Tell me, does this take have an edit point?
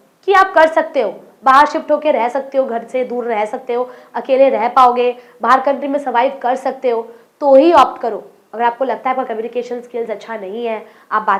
no; 0 cuts

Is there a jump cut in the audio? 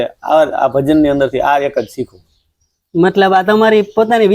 no; 0 cuts

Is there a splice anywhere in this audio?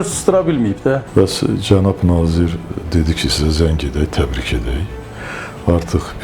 yes; 1 cut; at 1.1 s

